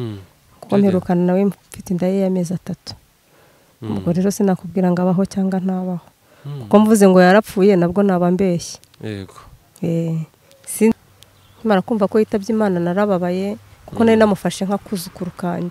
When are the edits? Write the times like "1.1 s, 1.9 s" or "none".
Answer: 10.9 s